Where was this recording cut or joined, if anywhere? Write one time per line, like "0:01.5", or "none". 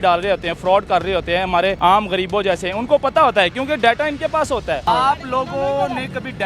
0:01.8
0:04.8